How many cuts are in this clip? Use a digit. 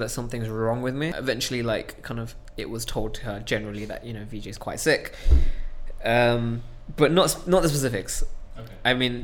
1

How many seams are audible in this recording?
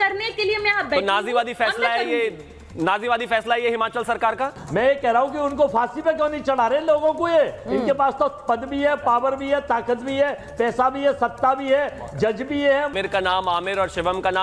2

